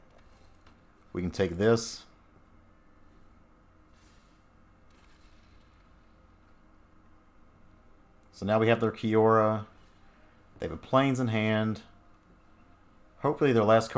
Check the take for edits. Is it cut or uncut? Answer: uncut